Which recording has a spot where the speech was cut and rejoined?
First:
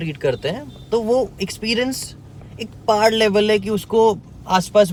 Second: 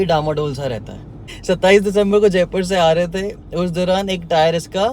second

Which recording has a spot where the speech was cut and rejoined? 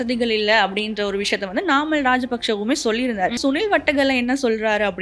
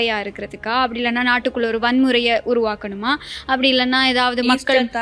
first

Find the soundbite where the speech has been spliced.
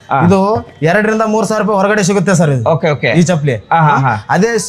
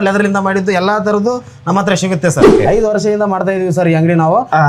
second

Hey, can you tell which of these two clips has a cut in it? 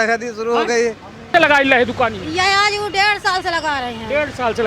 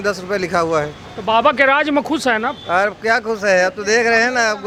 first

